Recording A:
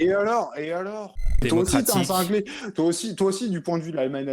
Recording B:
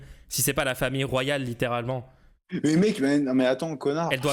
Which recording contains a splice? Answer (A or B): A